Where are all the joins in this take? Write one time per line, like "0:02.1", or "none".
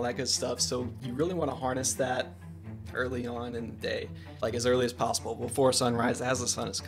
none